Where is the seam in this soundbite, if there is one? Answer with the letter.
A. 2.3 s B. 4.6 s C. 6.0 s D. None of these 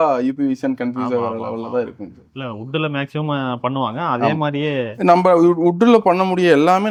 D